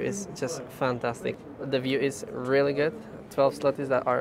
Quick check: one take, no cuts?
yes; 0 cuts

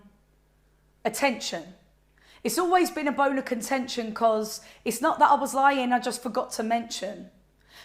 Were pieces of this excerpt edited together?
no; 0 cuts

